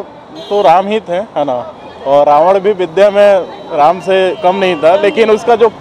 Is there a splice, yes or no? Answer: no